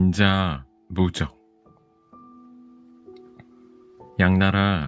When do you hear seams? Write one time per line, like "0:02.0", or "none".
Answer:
none